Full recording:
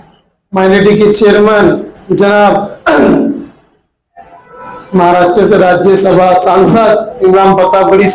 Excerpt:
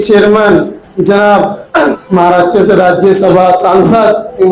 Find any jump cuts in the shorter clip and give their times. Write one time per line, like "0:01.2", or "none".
0:01.9